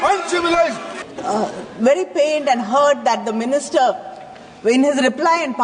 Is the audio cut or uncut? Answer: cut